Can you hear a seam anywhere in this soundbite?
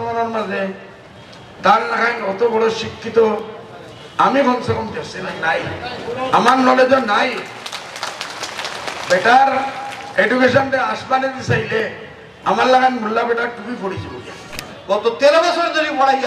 yes; 1 cut; at 14.7 s

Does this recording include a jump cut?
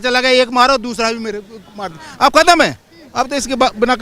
no; 0 cuts

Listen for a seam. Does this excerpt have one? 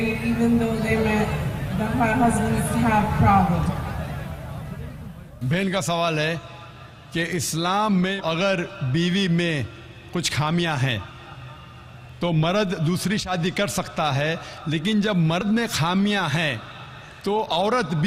no; 0 cuts

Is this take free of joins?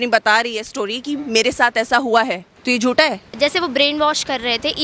no; 2 cuts; at 2.5 s, 3.3 s

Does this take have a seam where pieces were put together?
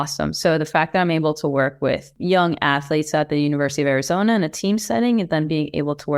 yes; 1 cut; at 2.1 s

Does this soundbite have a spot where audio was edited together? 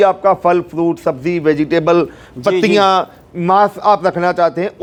no; 0 cuts

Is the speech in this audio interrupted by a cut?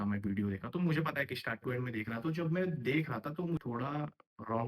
yes; 1 cut; at 3.6 s

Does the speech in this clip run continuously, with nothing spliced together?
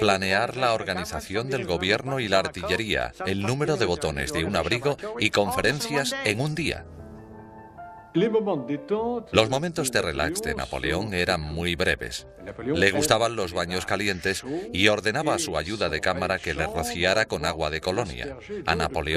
yes; 0 cuts

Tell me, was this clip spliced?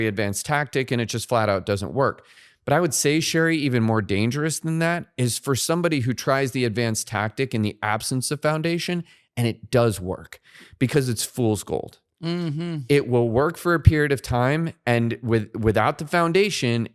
no; 0 cuts

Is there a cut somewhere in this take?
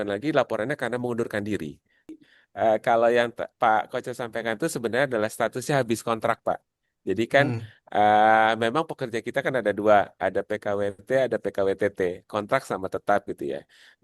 yes; 1 cut; at 2.2 s

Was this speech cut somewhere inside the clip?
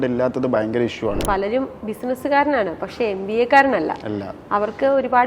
yes; 1 cut; at 1.2 s

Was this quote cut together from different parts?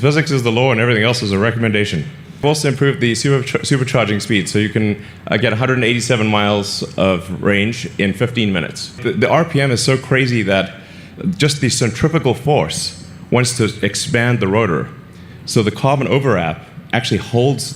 yes; 2 cuts; at 2.4 s, 8.9 s

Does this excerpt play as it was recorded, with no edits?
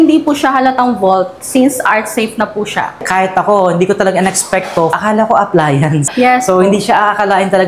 no; 3 cuts; at 3.0 s, 4.9 s, 6.1 s

